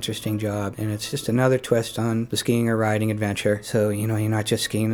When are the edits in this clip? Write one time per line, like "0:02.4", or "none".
0:01.0
0:02.3
0:03.6